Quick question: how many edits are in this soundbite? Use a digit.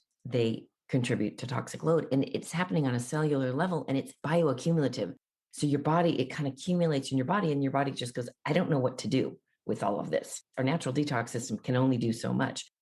0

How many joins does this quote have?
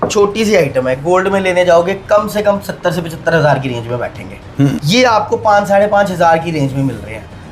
1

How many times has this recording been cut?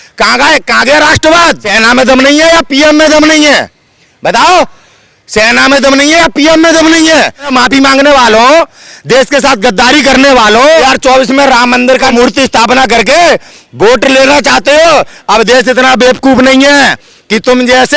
4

